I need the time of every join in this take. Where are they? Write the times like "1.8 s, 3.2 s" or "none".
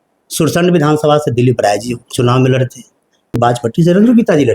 3.5 s